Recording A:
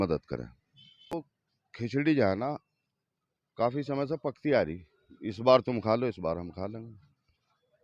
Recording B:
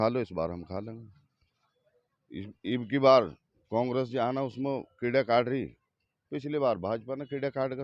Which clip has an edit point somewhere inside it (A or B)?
A